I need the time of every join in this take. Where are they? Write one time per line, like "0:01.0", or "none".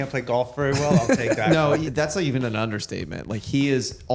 0:01.9